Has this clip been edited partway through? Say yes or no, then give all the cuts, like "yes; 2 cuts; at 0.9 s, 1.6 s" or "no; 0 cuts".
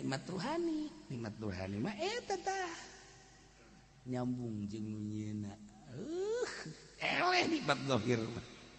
no; 0 cuts